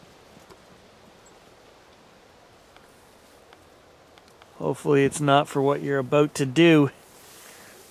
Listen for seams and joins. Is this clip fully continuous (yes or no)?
yes